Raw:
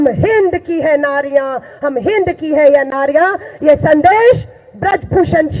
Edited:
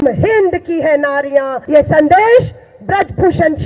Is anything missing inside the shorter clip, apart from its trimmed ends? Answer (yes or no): yes